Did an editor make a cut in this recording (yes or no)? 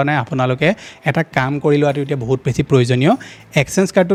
no